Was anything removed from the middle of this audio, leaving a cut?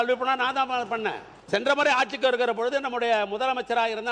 yes; 1 cut; at 1.3 s

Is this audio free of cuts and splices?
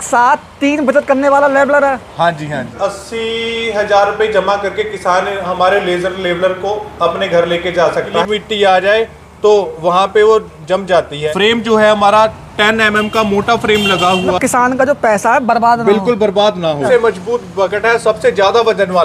no; 5 cuts; at 2.8 s, 8.2 s, 11.2 s, 14.4 s, 16.9 s

